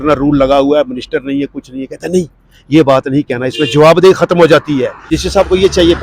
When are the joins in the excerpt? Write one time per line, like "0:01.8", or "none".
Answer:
0:05.1